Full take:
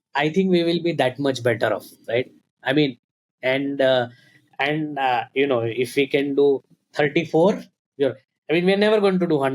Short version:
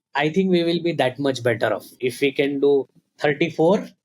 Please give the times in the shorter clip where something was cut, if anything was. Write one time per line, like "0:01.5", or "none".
0:02.0